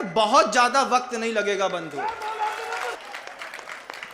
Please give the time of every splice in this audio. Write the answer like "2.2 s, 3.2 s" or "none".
3.0 s